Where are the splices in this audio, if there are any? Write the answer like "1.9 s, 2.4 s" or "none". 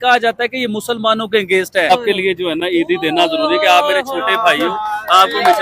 1.9 s